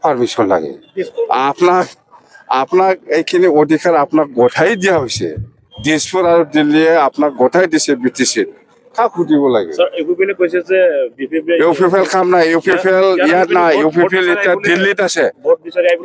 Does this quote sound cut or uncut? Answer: uncut